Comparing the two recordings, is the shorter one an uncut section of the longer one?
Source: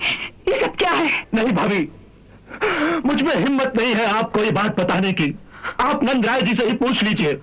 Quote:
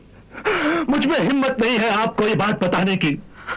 yes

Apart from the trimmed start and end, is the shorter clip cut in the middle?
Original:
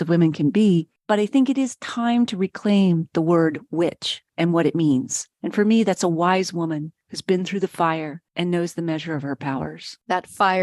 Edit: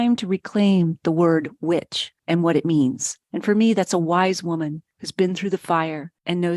no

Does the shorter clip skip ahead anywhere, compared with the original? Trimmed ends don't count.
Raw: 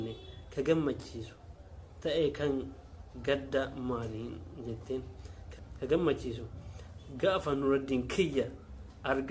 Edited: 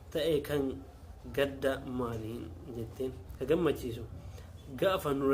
yes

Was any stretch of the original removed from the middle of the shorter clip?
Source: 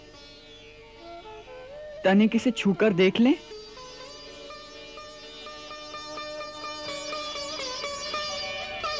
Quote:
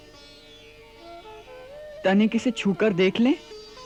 no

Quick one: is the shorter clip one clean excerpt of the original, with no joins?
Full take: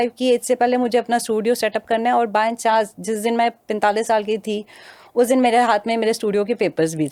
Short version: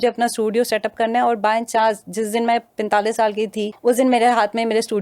no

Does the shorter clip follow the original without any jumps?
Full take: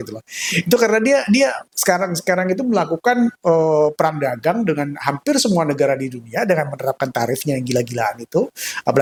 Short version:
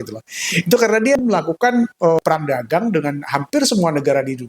no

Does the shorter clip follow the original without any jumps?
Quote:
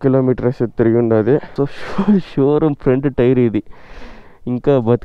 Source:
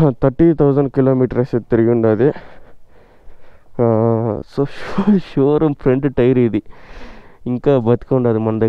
no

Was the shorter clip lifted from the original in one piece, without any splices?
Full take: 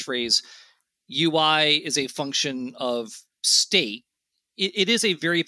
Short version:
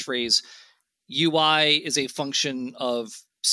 yes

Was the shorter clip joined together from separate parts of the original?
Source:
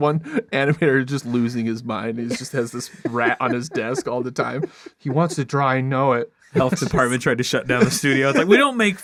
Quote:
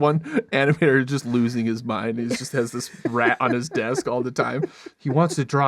no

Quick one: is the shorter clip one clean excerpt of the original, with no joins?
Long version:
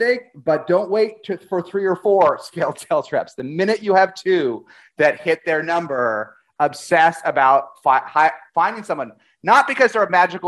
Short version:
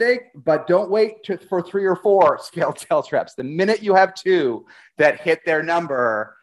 yes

